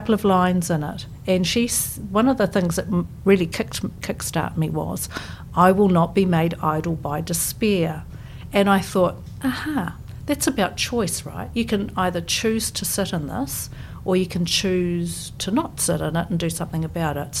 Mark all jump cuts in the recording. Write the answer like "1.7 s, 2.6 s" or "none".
none